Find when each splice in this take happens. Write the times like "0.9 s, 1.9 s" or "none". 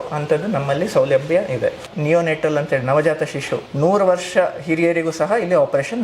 1.9 s, 3.6 s

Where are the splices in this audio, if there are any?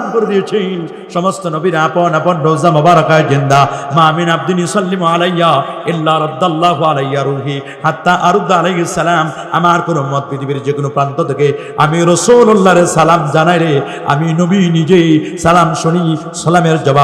none

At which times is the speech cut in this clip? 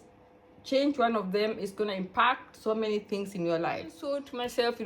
3.9 s

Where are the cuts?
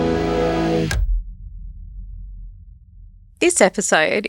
3.2 s

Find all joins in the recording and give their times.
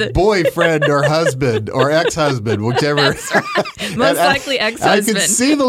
none

